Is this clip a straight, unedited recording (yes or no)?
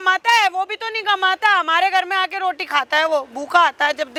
yes